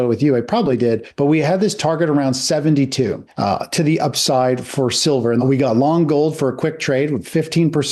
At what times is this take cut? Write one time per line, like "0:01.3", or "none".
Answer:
0:01.1
0:05.4